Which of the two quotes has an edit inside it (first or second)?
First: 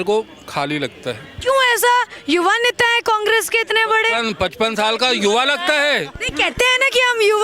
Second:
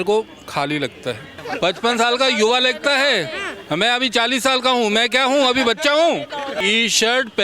second